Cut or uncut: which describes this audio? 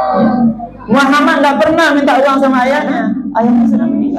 cut